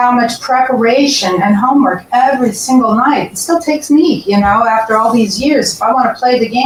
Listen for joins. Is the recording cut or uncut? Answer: uncut